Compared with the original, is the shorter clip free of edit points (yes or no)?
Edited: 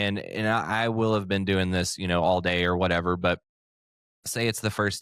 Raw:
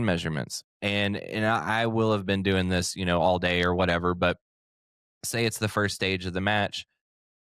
yes